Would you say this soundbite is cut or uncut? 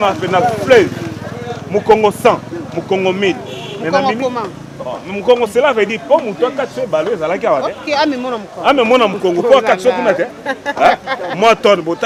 uncut